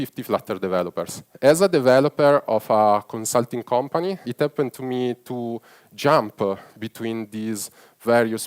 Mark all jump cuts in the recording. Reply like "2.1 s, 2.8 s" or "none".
1.2 s, 4.3 s